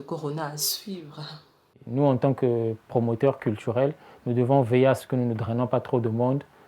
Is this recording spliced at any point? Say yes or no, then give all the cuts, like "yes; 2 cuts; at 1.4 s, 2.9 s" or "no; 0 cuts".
yes; 1 cut; at 1.7 s